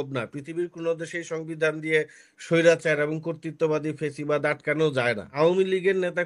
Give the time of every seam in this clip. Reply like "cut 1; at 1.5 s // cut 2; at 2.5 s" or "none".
cut 1; at 5.3 s

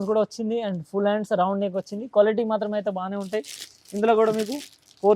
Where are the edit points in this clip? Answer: none

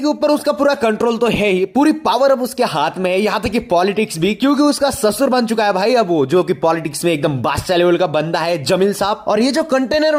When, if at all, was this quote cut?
none

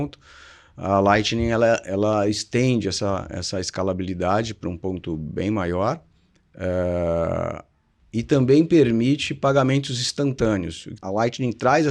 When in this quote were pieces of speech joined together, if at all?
cut 1; at 11.0 s

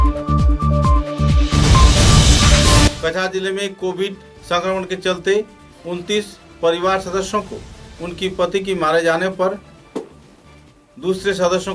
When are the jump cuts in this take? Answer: cut 1; at 2.9 s

